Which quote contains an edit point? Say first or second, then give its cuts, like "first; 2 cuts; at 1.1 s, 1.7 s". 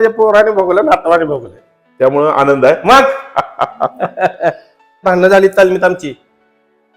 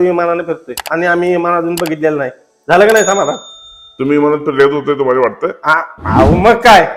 first; 1 cut; at 5.0 s